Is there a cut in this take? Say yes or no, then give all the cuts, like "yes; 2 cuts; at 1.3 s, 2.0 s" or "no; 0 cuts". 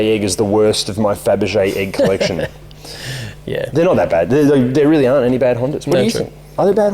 no; 0 cuts